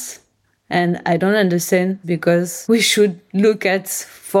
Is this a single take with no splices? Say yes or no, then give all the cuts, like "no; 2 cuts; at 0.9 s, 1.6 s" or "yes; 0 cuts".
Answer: no; 1 cut; at 2.2 s